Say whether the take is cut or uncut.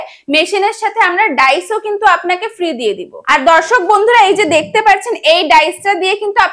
uncut